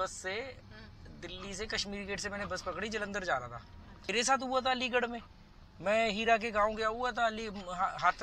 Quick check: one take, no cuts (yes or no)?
no